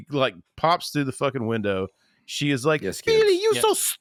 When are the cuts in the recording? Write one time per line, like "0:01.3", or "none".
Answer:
none

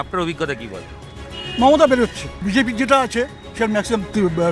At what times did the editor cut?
0:02.4

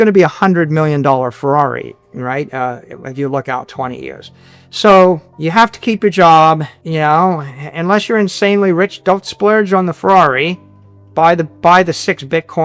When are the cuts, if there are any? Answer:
0:05.3
0:06.8

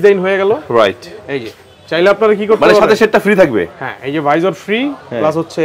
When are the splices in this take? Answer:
none

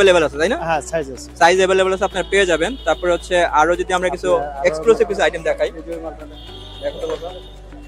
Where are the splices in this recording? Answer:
none

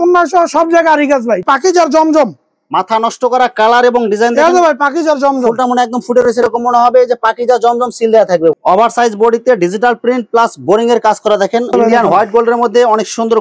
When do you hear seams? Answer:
0:01.4
0:08.5
0:11.7

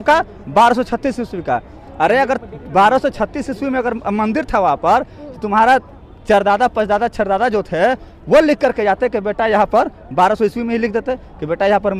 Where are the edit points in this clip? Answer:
none

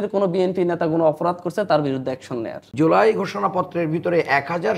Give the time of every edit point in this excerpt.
0:02.6

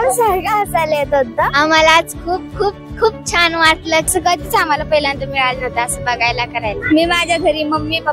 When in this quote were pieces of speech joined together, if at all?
0:01.5
0:04.1
0:06.8

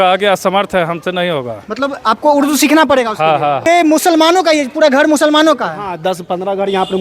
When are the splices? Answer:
0:03.6

